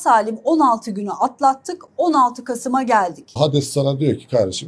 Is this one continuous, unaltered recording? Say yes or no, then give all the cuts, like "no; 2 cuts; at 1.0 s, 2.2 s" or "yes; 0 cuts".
no; 1 cut; at 3.3 s